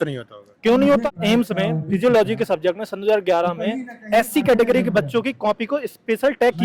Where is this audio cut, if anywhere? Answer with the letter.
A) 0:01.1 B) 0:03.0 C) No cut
A